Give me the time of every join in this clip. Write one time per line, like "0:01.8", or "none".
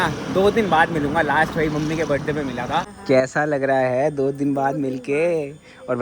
0:02.9